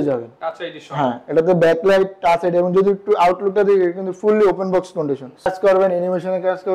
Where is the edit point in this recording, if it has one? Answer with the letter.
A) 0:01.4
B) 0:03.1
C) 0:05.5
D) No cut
C